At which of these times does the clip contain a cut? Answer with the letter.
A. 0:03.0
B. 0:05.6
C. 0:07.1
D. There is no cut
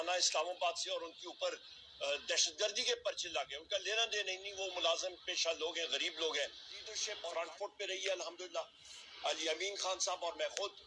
C